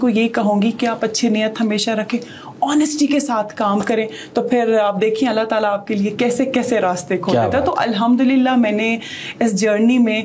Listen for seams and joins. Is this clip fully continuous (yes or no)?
yes